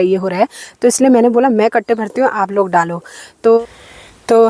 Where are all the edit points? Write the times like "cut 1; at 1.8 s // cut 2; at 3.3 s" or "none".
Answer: cut 1; at 3.6 s

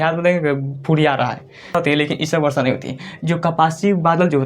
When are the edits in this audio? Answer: cut 1; at 1.8 s

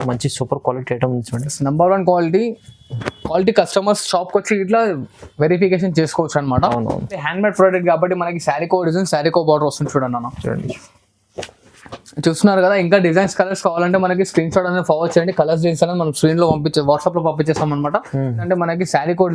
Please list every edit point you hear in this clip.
cut 1; at 7.3 s // cut 2; at 18.4 s

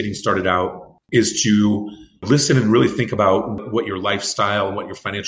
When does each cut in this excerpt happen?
cut 1; at 0.9 s

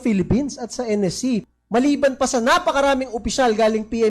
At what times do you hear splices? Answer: cut 1; at 1.4 s

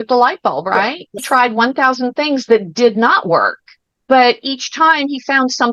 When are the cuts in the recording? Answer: cut 1; at 1.2 s

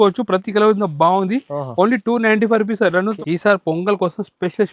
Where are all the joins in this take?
cut 1; at 3.2 s

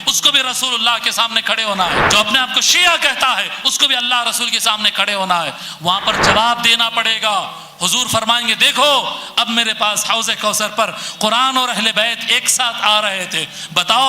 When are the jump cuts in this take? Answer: cut 1; at 2.0 s

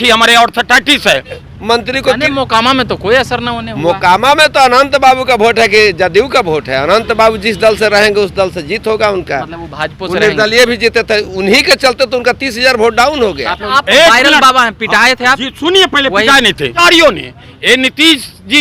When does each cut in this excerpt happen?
cut 1; at 1.5 s // cut 2; at 13.6 s // cut 3; at 16.8 s

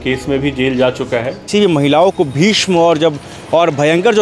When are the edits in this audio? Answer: cut 1; at 1.4 s

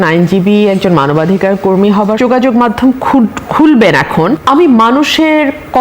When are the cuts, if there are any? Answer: cut 1; at 2.2 s // cut 2; at 4.4 s

